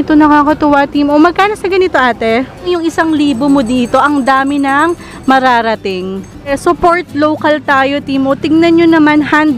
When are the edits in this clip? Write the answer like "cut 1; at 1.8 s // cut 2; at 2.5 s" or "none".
cut 1; at 2.7 s // cut 2; at 6.2 s